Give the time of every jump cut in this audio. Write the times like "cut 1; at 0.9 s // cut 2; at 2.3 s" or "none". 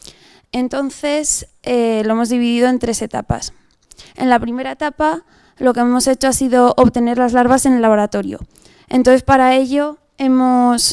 cut 1; at 2.1 s